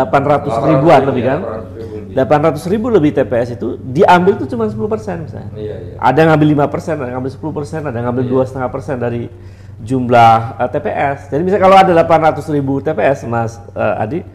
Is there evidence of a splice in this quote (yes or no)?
no